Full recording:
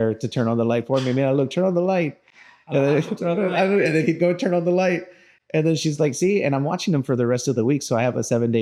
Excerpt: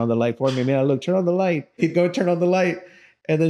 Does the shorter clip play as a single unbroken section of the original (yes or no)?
no